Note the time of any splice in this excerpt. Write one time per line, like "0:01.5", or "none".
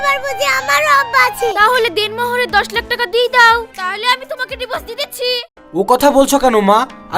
0:01.5
0:05.6